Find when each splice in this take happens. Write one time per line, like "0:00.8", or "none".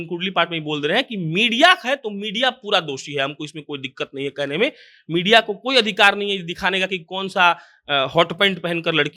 none